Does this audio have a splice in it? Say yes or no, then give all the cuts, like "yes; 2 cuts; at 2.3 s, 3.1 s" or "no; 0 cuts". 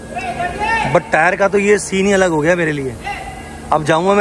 no; 0 cuts